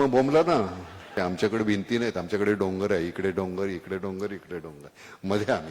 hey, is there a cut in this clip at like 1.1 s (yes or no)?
yes